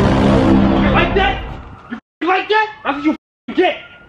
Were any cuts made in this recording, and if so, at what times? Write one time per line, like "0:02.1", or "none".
0:02.8